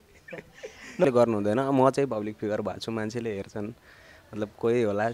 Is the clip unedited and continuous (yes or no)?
no